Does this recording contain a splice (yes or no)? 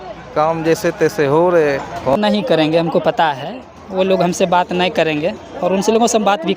yes